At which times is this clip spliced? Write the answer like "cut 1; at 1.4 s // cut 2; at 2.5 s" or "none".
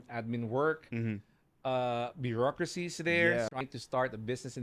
cut 1; at 3.5 s